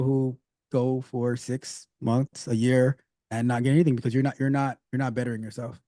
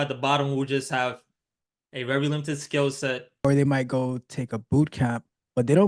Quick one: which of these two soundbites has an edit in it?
second; 1 cut; at 3.4 s

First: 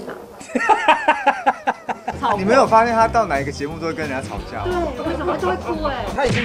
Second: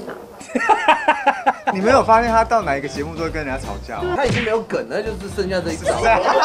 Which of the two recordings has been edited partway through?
second; 2 cuts; at 1.8 s, 4.2 s

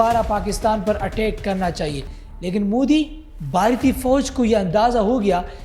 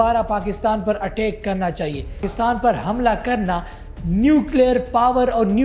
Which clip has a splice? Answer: second; 1 cut; at 2.3 s

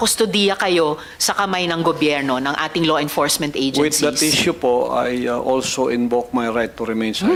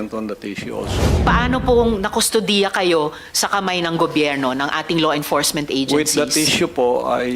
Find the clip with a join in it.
second; 1 cut; at 1.1 s

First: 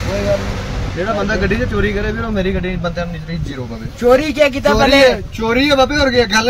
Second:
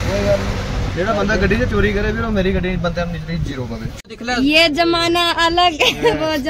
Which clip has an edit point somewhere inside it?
second; 1 cut; at 3.9 s

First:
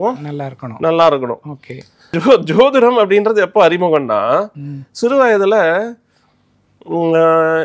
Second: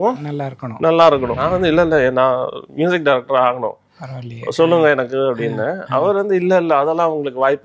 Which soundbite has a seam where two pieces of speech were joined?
second; 1 cut; at 1.4 s

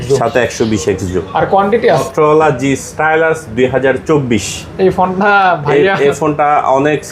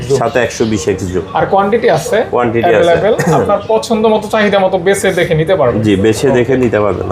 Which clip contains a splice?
first; 1 cut; at 2.0 s

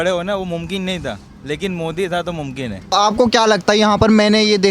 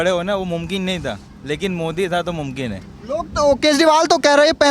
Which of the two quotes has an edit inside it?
first; 1 cut; at 2.9 s

